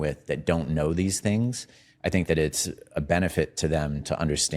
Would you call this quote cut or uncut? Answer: uncut